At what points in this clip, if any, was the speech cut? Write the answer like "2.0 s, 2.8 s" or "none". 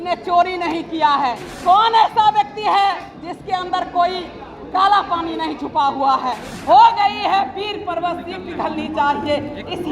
1.5 s, 6.5 s